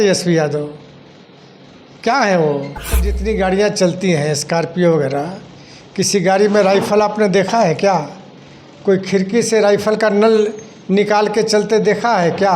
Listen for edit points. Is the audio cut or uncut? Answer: cut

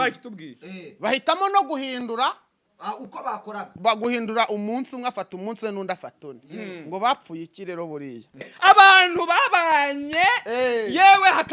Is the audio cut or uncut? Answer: cut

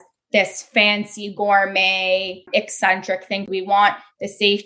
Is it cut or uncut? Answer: cut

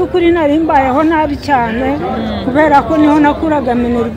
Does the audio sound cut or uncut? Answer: uncut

